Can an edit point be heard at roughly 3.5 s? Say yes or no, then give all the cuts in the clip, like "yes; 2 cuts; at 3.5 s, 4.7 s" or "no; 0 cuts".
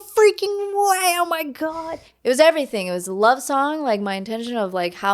no; 1 cut; at 2.1 s